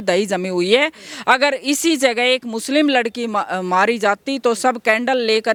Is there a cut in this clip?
no; 0 cuts

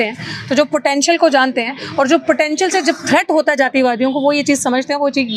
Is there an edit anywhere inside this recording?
no; 0 cuts

